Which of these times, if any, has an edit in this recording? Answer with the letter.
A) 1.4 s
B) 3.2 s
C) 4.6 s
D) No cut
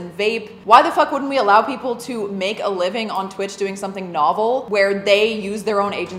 C